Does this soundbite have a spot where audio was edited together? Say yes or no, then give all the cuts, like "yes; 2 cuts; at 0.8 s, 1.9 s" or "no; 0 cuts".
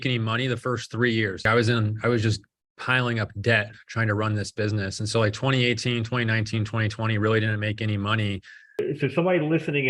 yes; 2 cuts; at 1.4 s, 8.8 s